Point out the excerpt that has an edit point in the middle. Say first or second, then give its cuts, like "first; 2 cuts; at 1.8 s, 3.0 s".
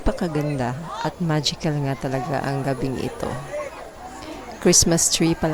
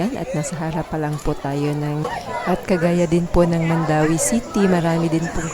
second; 1 cut; at 2.1 s